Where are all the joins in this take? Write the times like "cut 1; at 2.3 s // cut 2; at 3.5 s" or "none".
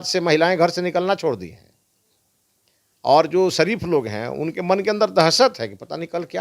none